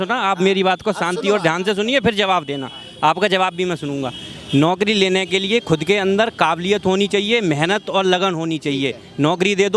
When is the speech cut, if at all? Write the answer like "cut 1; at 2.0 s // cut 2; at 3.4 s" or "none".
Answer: none